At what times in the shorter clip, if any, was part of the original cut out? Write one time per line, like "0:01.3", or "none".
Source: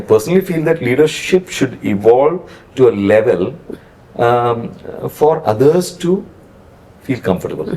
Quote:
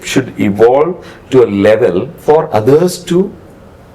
0:02.1